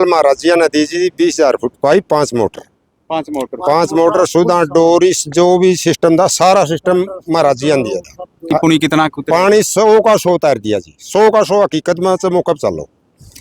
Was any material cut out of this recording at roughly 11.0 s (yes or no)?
no